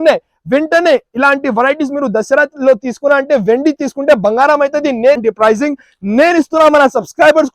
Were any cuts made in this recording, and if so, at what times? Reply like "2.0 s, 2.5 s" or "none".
5.2 s